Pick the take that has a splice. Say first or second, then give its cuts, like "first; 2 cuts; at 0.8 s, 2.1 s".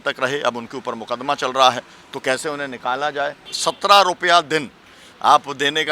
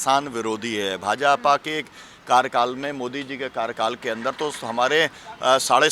first; 1 cut; at 3.5 s